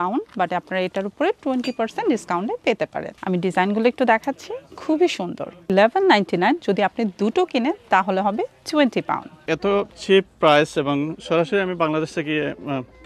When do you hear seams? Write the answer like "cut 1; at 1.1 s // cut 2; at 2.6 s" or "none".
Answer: cut 1; at 3.1 s // cut 2; at 5.7 s // cut 3; at 9.4 s